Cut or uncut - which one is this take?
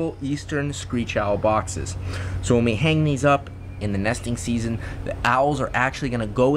uncut